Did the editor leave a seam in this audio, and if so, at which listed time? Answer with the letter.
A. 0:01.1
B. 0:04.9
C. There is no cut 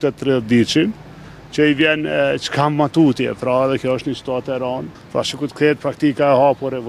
B